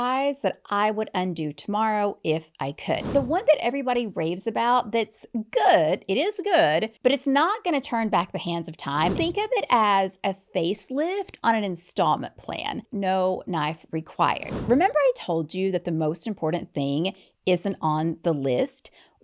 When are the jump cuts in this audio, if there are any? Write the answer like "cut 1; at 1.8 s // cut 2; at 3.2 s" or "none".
cut 1; at 3.1 s // cut 2; at 6.9 s // cut 3; at 9.2 s // cut 4; at 12.9 s // cut 5; at 14.5 s